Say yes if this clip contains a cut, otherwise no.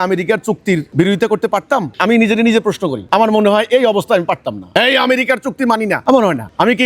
yes